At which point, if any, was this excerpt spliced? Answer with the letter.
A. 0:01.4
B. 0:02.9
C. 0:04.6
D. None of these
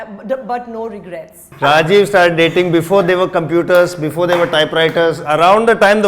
A